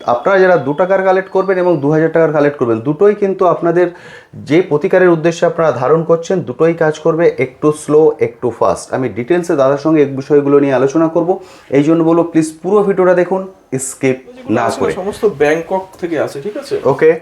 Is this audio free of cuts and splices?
no; 1 cut; at 15.0 s

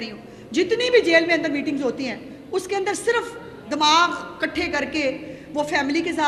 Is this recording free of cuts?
yes; 0 cuts

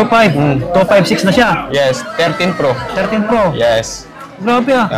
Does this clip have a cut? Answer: no; 0 cuts

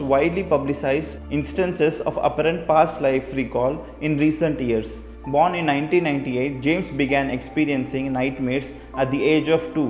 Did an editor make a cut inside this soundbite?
no; 0 cuts

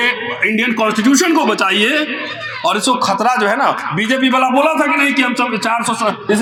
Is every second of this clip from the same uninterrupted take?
yes; 0 cuts

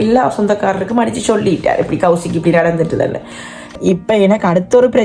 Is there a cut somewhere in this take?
yes; 1 cut; at 3.7 s

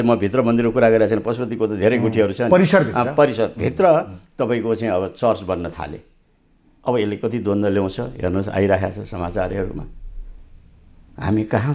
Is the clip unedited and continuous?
yes; 0 cuts

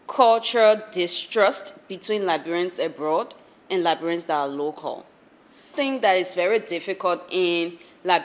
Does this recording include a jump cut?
yes; 1 cut; at 5.7 s

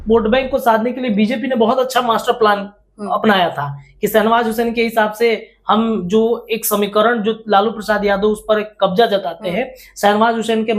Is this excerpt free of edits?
yes; 0 cuts

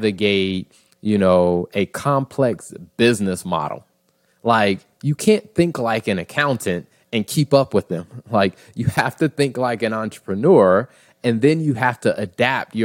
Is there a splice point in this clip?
no; 0 cuts

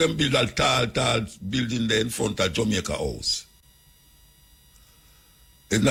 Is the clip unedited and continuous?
yes; 0 cuts

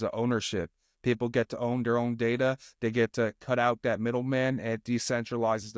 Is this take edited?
no; 0 cuts

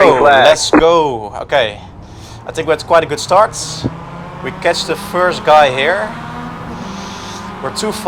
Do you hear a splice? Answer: no; 0 cuts

